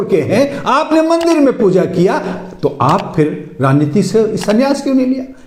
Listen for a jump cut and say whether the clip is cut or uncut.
uncut